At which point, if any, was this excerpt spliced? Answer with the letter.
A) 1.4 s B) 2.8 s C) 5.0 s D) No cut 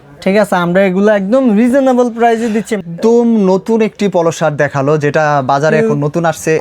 B